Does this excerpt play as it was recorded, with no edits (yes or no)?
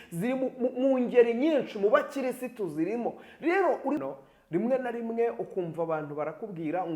no